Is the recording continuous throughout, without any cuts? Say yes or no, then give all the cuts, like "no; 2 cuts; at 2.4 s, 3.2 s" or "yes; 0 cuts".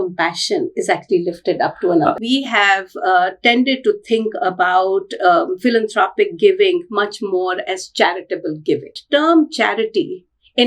no; 2 cuts; at 2.2 s, 8.9 s